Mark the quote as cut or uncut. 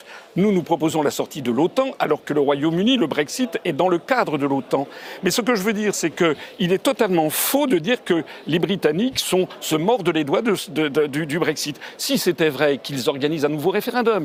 uncut